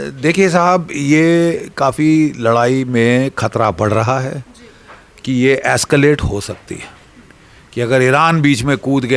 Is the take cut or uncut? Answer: uncut